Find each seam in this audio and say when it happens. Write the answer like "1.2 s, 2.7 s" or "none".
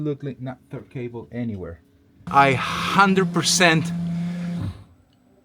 2.2 s